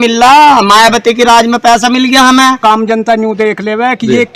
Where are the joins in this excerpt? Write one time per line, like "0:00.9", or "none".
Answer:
0:02.6